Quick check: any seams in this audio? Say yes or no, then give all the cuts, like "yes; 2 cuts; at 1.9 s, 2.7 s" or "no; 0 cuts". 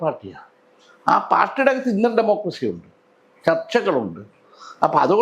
no; 0 cuts